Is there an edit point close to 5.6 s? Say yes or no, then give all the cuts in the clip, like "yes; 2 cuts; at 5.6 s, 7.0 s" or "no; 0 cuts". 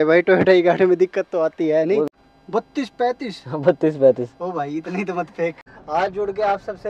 yes; 2 cuts; at 2.1 s, 5.6 s